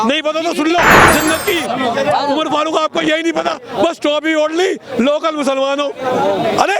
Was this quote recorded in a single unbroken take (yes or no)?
no